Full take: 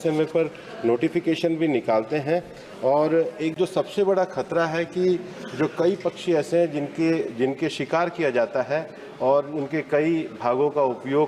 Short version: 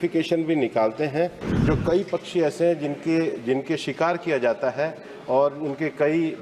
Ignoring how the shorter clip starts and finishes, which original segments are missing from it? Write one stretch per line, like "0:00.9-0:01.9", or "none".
0:02.6-0:05.4